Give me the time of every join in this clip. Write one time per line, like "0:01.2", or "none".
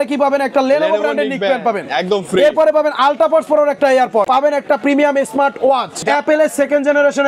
0:04.3
0:06.0